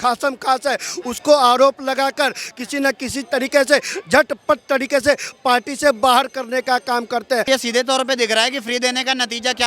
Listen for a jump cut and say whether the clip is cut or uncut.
cut